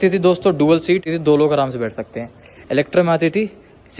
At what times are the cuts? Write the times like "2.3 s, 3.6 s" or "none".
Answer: 1.1 s